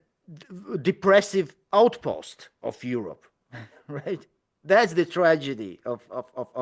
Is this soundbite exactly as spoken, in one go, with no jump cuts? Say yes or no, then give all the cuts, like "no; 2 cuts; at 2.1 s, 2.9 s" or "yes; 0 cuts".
yes; 0 cuts